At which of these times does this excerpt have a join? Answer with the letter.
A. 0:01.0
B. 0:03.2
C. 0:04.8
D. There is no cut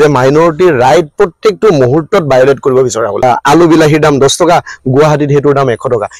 B